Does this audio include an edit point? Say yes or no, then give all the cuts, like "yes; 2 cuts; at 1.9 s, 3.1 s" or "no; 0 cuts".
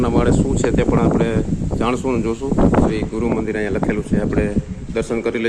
yes; 1 cut; at 2.9 s